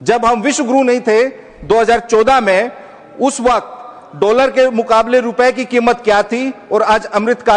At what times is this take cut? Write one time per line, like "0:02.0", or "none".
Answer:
none

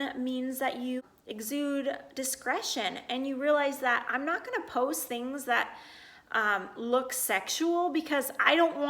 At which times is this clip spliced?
0:01.0

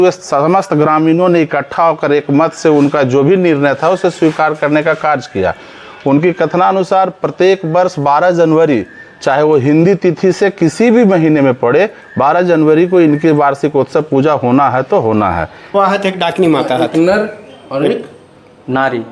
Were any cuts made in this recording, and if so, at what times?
0:15.7

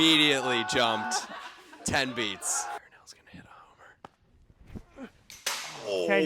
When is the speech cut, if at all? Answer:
0:02.8

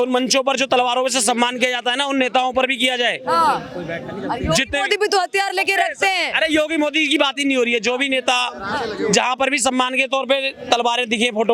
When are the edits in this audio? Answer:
none

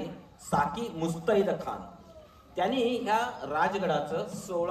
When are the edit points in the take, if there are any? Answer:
none

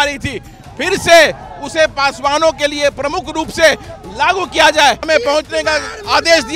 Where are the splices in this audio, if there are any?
0:05.0

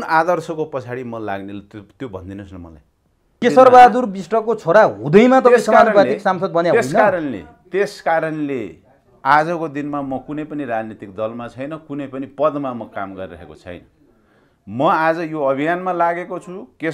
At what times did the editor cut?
0:03.4

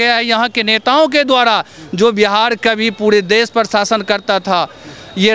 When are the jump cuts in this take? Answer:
none

